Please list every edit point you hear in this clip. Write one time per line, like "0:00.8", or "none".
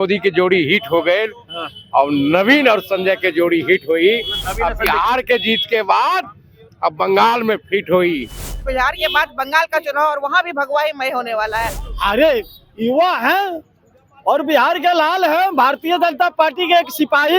0:08.6
0:11.7